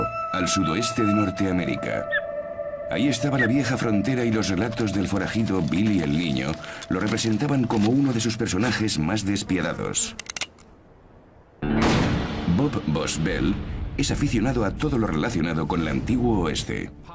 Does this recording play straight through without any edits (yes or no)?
no